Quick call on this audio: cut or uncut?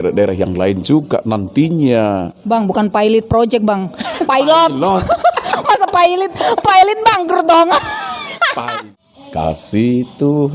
cut